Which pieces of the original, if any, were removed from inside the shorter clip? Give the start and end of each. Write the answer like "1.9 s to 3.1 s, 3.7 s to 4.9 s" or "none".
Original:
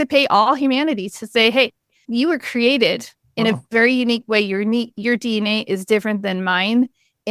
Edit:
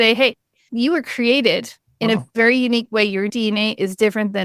4.7 s to 5.2 s